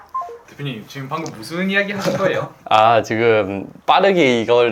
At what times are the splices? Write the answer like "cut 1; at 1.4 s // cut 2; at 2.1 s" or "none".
none

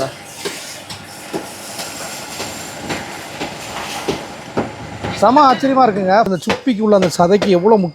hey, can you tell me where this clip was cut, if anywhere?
cut 1; at 6.3 s

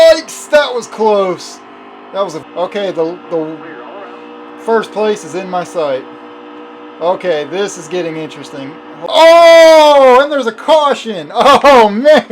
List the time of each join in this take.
cut 1; at 2.4 s // cut 2; at 8.9 s

